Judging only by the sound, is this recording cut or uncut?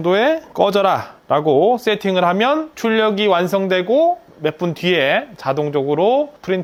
uncut